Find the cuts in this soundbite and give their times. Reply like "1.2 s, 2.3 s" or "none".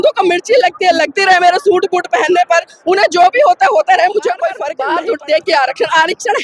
4.7 s